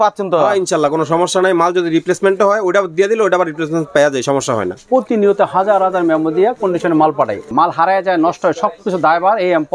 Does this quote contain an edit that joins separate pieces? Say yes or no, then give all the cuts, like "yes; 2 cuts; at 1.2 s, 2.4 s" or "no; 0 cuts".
yes; 2 cuts; at 4.8 s, 7.5 s